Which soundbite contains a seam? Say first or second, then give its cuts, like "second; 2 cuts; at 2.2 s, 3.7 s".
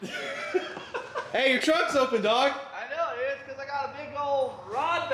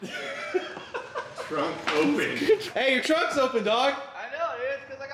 first; 1 cut; at 1.3 s